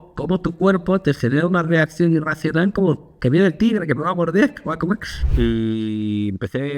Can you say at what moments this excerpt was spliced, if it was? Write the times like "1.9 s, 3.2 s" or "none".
5.2 s